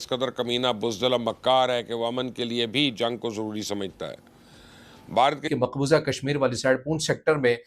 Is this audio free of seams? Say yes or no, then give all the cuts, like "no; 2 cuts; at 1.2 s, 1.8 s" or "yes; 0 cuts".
no; 1 cut; at 5.5 s